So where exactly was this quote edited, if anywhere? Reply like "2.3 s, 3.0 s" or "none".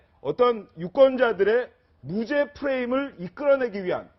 1.6 s